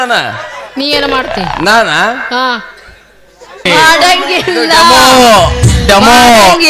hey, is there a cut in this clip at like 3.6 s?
yes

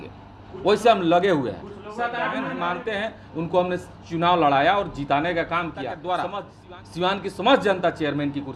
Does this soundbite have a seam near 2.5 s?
yes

